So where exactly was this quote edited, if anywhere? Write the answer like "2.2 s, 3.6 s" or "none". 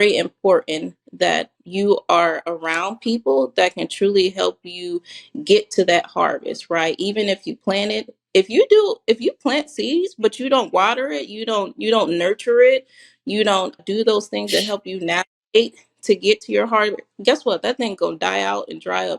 1.6 s, 13.8 s